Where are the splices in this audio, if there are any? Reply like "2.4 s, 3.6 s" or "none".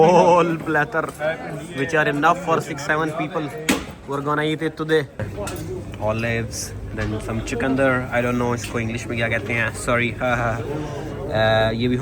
5.2 s